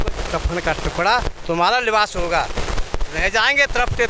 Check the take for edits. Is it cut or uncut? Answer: uncut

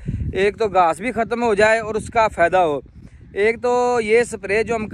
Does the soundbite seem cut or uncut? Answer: uncut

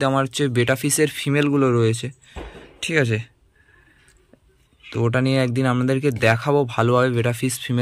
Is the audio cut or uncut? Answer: uncut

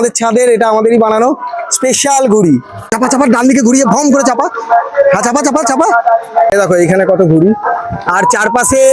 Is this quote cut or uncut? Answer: cut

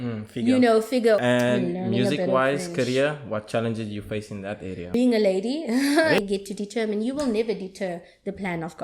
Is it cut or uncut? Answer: cut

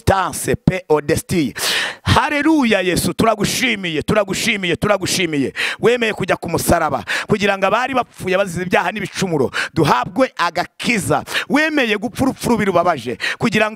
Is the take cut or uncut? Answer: uncut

